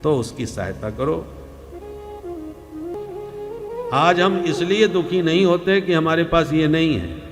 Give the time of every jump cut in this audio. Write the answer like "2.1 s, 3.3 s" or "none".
2.9 s